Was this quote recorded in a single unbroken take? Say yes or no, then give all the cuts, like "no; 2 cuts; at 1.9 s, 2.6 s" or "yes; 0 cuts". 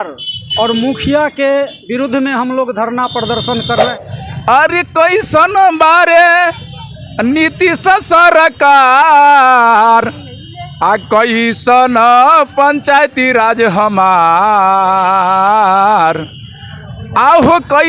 no; 1 cut; at 3.9 s